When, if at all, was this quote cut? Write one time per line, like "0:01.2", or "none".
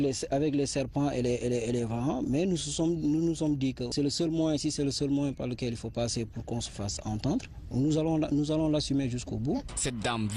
none